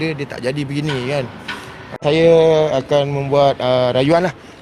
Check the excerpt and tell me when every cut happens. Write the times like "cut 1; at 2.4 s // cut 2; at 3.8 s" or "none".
cut 1; at 2.0 s